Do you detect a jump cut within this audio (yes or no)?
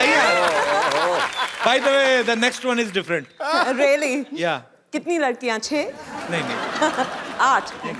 no